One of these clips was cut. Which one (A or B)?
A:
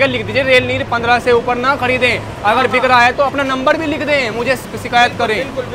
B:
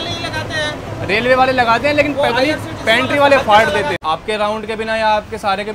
B